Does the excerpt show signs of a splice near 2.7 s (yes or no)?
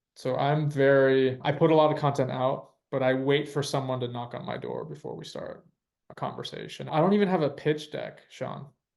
no